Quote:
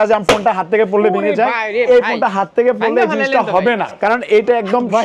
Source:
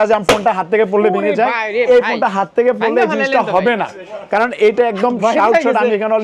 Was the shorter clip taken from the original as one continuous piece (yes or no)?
no